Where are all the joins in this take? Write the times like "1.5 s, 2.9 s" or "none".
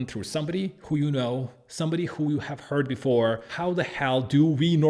3.5 s

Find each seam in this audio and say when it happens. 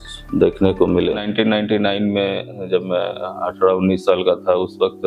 1.2 s

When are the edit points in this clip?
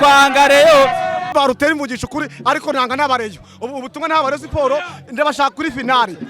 1.3 s

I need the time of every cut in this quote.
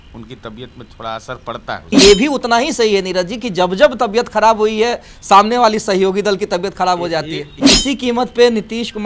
1.9 s, 7.6 s

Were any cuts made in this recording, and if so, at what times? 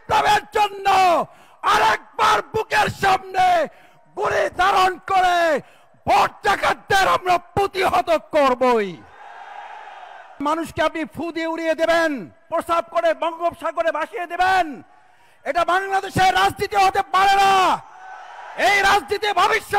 10.4 s, 12.4 s

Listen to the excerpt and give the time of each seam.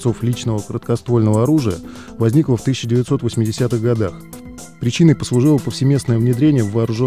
5.0 s

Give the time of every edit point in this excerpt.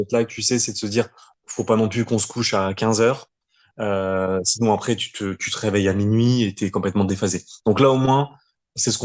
none

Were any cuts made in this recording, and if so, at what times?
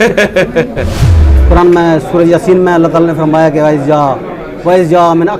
1.3 s

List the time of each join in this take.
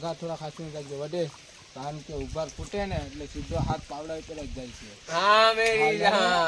none

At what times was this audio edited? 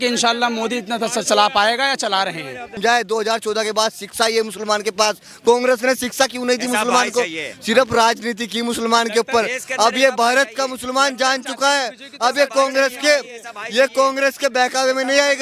2.7 s

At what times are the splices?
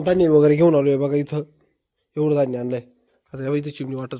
none

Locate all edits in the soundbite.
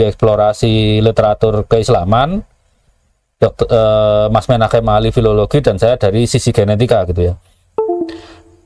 none

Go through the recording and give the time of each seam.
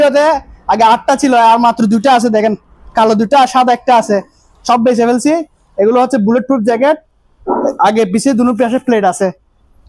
none

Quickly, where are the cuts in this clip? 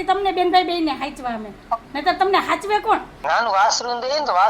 3.1 s

